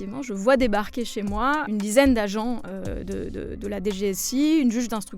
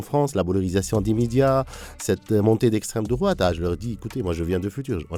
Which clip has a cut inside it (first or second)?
first